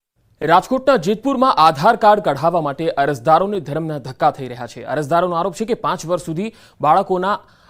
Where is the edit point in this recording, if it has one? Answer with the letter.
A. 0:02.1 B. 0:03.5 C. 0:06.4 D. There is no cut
B